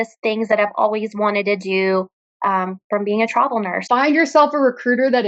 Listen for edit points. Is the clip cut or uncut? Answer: cut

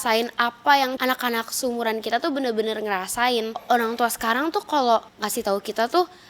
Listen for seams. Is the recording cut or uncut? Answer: cut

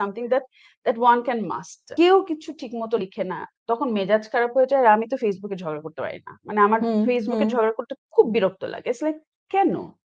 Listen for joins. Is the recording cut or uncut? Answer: uncut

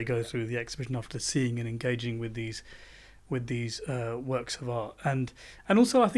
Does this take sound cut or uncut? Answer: uncut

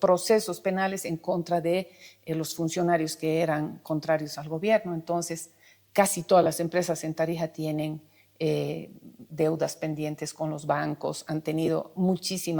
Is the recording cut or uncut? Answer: uncut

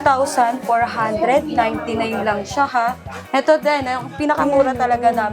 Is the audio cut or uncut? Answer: cut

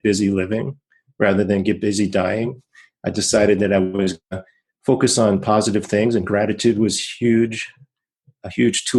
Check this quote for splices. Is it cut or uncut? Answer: uncut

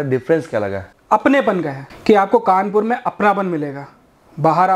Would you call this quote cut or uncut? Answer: cut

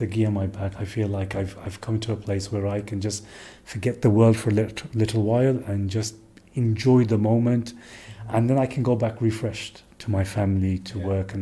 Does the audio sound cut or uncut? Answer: uncut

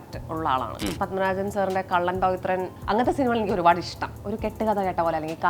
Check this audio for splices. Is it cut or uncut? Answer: cut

